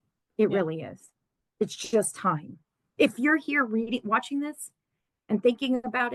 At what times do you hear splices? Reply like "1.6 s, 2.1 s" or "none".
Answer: none